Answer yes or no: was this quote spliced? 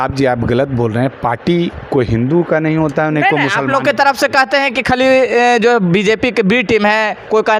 no